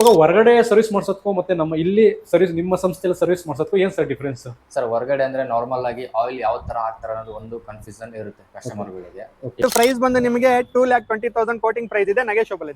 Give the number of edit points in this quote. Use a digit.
1